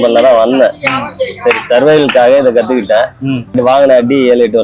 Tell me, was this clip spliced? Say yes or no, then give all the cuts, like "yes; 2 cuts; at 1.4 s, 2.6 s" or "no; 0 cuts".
yes; 1 cut; at 3.6 s